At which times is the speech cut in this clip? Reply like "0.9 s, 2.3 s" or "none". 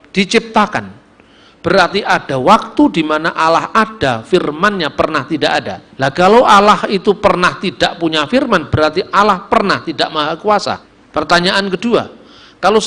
5.8 s, 10.9 s